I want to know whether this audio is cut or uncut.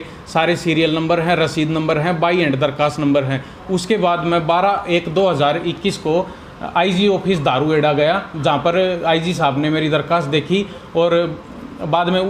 uncut